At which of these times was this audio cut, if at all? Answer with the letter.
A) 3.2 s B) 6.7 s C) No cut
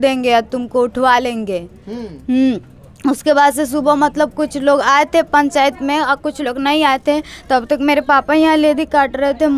C